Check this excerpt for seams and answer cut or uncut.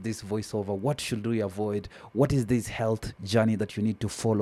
uncut